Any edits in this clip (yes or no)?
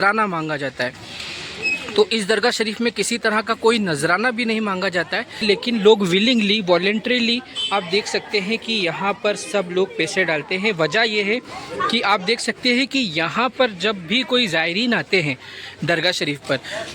yes